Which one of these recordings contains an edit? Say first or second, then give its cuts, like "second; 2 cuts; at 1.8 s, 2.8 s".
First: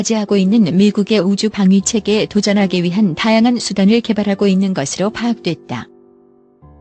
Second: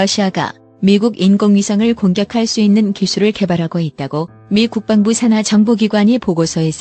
first; 1 cut; at 5.9 s